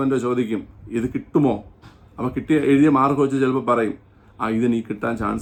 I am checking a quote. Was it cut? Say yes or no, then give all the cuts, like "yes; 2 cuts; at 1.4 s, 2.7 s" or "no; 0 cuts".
no; 0 cuts